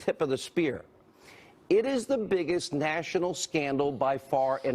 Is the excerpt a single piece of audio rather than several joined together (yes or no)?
no